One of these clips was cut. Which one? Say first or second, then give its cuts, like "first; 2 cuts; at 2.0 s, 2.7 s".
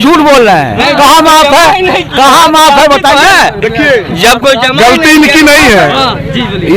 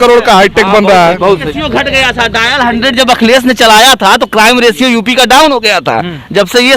second; 1 cut; at 1.5 s